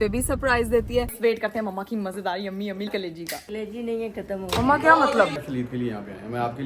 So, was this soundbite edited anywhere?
yes; 3 cuts; at 1.1 s, 2.9 s, 5.4 s

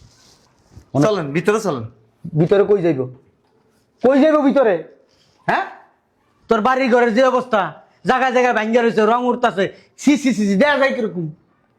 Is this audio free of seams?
yes; 0 cuts

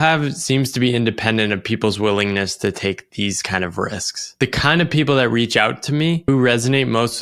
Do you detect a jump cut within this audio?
yes; 2 cuts; at 4.3 s, 6.2 s

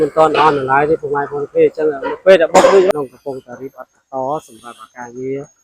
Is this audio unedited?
no; 1 cut; at 2.9 s

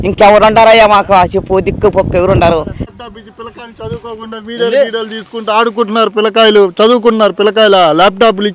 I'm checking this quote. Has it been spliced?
yes; 1 cut; at 2.8 s

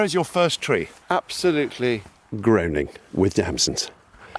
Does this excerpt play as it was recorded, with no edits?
yes; 0 cuts

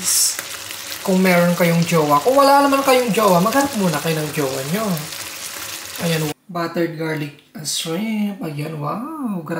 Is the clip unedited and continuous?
no; 1 cut; at 6.3 s

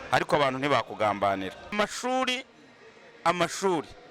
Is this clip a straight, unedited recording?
no; 1 cut; at 1.7 s

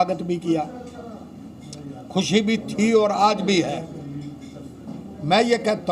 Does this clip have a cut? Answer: no; 0 cuts

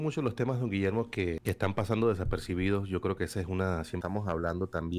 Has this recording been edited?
yes; 2 cuts; at 1.4 s, 4.0 s

